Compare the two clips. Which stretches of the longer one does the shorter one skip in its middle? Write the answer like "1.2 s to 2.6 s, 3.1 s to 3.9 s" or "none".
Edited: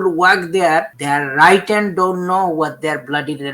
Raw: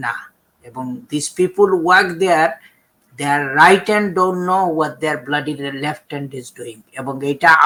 2.6 s to 3.1 s